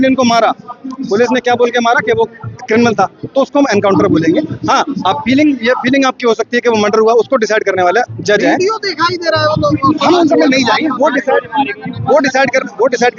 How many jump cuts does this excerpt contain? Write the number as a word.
zero